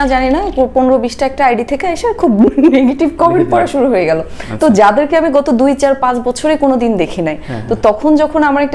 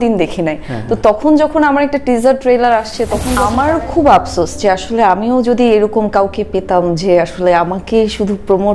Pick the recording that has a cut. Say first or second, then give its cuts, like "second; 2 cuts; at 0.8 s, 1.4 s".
second; 1 cut; at 3.3 s